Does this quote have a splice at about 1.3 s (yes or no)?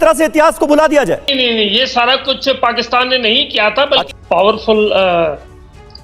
yes